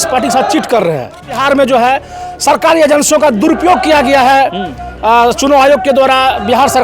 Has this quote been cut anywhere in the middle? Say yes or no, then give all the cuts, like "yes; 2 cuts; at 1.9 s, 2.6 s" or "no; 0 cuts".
yes; 1 cut; at 1.4 s